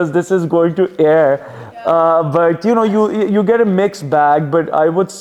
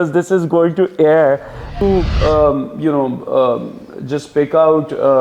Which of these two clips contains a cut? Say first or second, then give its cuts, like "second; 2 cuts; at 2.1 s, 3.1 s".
second; 1 cut; at 1.7 s